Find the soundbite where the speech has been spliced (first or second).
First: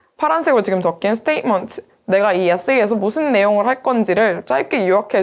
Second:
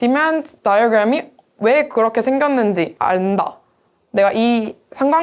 second